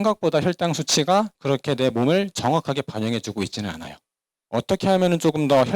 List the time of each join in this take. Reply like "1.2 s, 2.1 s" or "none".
1.4 s, 4.3 s